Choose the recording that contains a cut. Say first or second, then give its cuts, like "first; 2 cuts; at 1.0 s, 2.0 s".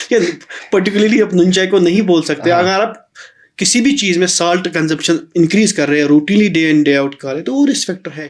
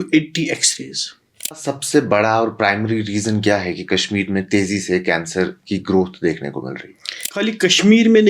second; 2 cuts; at 1.6 s, 7.2 s